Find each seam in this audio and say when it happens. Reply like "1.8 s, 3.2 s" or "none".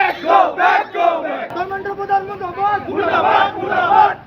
1.5 s